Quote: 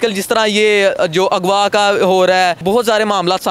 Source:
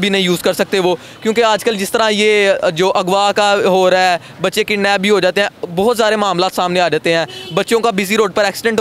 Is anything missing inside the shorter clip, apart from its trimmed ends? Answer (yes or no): yes